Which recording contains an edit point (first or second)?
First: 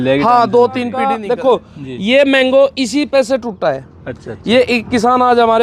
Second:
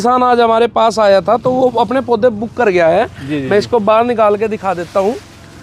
first